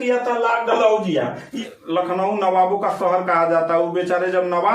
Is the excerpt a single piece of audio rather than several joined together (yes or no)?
no